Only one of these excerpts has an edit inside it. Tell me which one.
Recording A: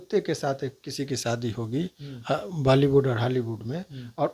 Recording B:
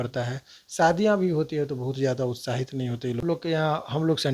B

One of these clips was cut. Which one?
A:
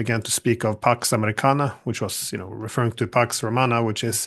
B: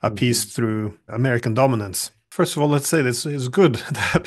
B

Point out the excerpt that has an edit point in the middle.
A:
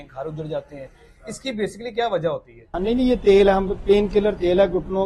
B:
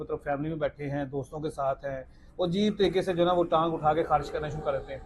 A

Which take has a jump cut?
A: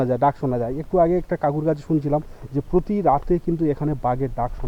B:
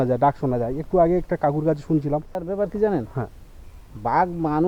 B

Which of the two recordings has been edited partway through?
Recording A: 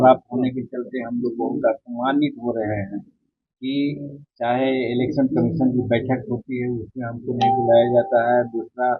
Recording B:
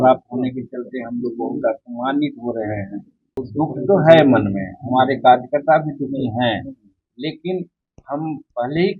B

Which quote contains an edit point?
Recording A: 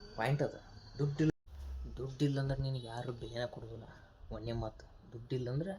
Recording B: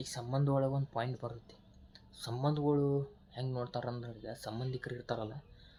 A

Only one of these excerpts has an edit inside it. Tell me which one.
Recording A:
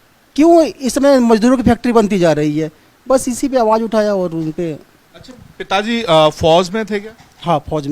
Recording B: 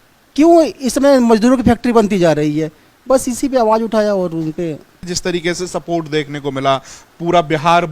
B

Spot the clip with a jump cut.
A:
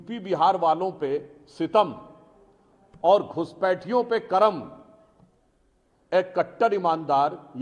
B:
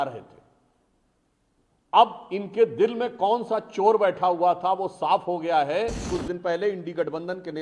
B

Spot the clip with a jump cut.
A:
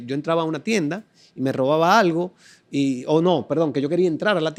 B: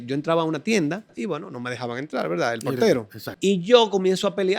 B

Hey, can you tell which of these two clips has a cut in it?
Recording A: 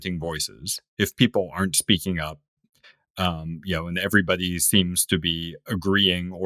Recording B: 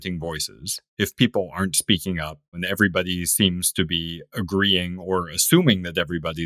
B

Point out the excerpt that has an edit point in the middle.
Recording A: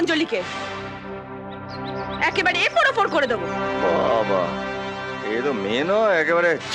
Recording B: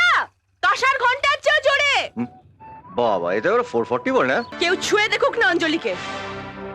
B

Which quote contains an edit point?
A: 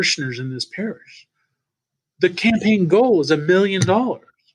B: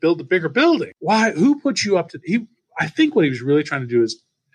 B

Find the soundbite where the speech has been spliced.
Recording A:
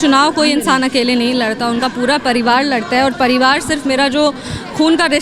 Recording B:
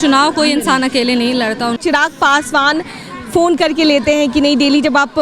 B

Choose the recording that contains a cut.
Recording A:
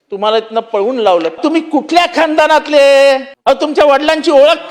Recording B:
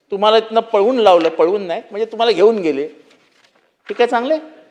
A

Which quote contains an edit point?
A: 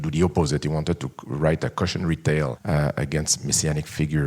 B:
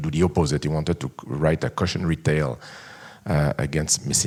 A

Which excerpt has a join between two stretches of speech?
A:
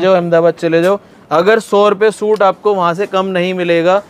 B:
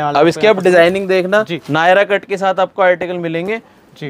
B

